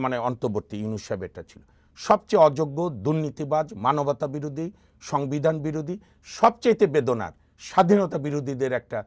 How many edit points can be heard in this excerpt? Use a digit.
0